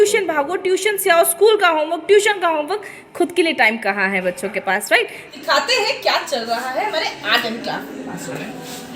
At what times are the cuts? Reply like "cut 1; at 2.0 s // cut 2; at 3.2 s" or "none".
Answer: cut 1; at 5.2 s